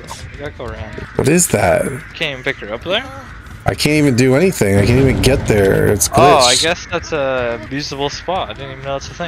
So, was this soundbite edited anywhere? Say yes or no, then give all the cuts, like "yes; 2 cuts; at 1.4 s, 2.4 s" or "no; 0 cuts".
yes; 3 cuts; at 1.0 s, 2.1 s, 7.7 s